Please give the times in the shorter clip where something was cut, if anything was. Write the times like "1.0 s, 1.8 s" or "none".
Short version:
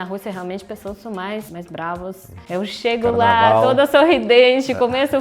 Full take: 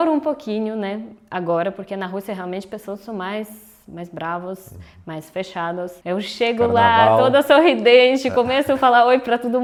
1.5 s, 2.4 s